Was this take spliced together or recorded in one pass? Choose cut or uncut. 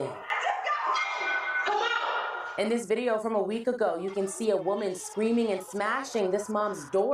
cut